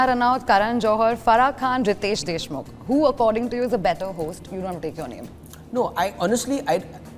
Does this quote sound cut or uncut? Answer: uncut